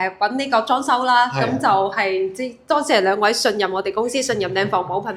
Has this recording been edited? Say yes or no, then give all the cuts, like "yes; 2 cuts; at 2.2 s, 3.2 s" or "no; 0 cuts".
no; 0 cuts